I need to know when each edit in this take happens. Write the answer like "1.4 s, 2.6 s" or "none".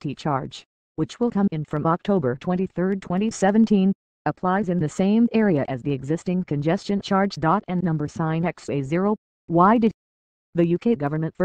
4.1 s